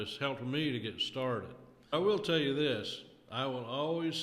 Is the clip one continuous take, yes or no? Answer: no